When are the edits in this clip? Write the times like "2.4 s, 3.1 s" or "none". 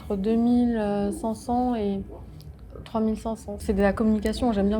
3.5 s